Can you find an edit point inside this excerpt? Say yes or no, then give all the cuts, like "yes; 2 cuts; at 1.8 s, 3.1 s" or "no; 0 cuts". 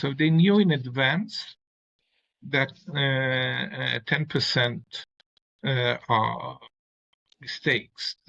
no; 0 cuts